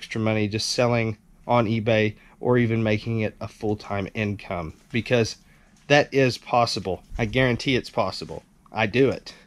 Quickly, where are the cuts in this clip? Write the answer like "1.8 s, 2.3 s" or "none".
7.1 s